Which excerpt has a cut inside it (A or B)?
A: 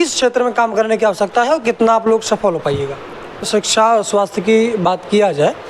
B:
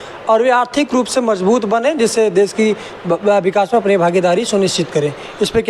A